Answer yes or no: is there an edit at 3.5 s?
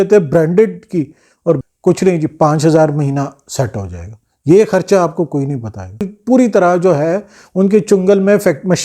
no